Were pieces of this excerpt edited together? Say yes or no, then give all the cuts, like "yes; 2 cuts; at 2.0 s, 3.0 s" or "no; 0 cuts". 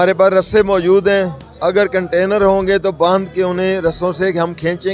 no; 0 cuts